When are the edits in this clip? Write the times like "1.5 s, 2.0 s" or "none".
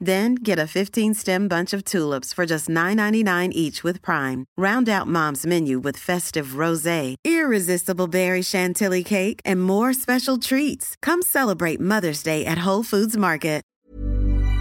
13.7 s